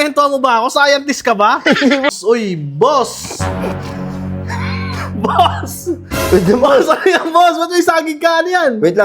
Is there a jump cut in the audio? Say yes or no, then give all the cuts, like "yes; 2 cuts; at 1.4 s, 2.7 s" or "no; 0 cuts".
yes; 1 cut; at 2.1 s